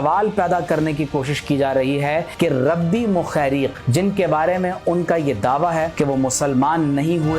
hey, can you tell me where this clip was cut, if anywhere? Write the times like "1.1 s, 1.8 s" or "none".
2.3 s, 3.8 s, 5.9 s

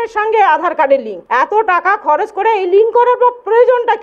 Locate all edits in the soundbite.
1.2 s

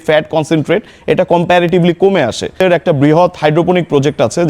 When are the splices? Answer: 2.6 s

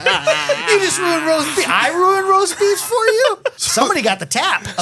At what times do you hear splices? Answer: 3.6 s

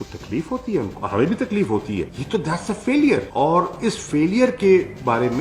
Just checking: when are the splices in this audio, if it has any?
1.0 s, 2.1 s

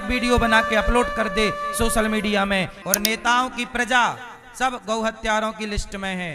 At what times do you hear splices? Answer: 2.8 s

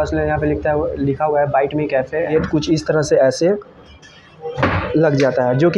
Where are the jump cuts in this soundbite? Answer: 2.2 s

